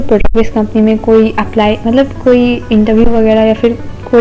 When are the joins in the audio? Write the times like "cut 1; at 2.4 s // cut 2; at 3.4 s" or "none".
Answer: none